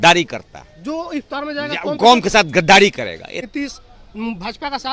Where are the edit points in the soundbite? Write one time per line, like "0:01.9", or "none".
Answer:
0:03.5